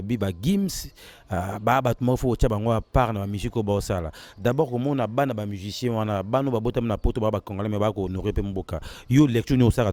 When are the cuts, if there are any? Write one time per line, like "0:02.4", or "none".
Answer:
none